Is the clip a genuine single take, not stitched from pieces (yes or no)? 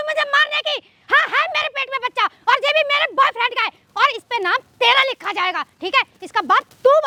yes